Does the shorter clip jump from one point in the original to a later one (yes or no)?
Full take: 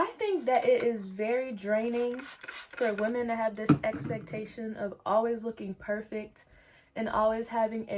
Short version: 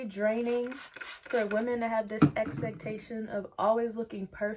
no